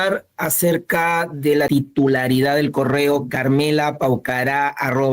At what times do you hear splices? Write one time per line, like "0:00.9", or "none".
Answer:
0:01.7